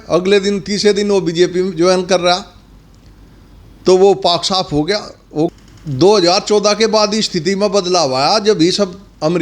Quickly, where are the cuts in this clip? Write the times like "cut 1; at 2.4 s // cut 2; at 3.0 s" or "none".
cut 1; at 5.5 s